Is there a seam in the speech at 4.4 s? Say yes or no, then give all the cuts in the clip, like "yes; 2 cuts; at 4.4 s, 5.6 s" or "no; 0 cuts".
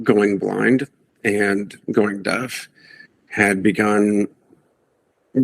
no; 0 cuts